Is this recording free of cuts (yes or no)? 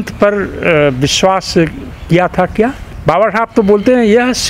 no